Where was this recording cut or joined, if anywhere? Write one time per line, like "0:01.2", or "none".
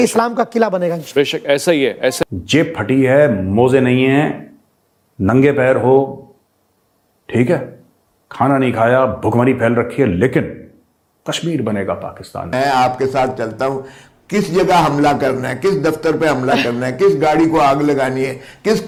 none